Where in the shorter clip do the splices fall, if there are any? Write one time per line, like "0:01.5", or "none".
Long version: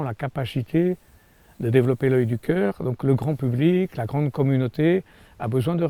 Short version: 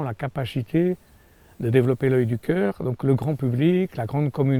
none